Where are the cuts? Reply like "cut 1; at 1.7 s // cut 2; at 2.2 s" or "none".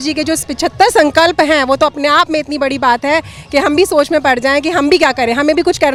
none